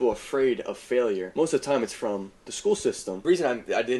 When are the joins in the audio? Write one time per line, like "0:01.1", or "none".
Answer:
0:01.3
0:03.2

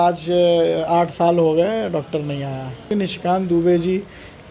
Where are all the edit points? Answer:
0:02.9

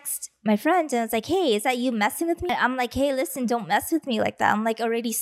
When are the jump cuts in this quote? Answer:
0:02.5

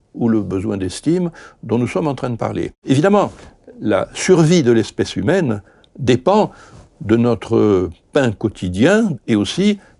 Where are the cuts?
0:02.7
0:09.2

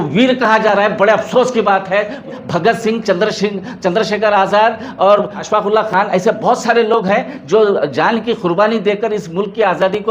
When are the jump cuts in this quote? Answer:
0:02.3
0:05.4

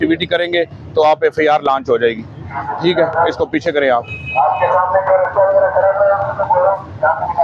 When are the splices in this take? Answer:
none

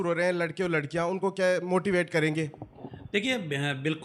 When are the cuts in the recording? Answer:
none

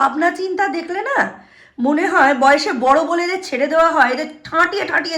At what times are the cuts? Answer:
none

